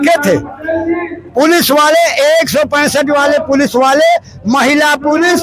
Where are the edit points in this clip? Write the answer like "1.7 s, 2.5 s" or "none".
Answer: none